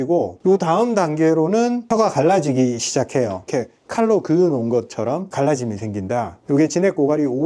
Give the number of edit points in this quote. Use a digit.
2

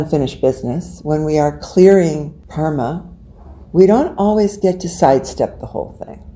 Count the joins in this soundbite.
1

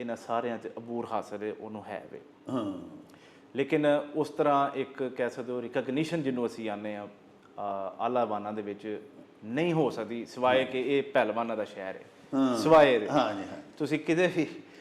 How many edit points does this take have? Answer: 0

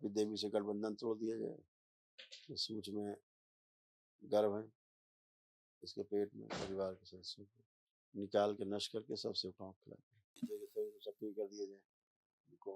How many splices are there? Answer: 1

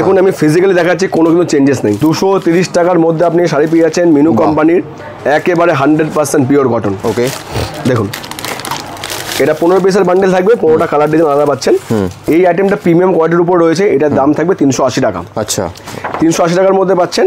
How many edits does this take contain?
2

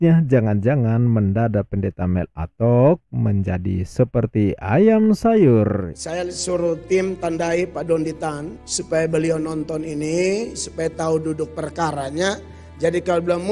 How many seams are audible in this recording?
1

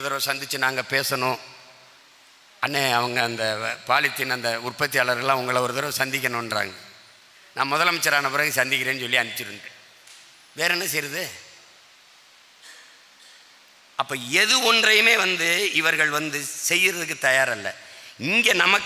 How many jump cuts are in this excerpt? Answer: 0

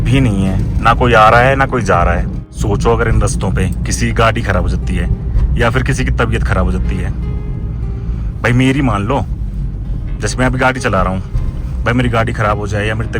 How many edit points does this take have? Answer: 1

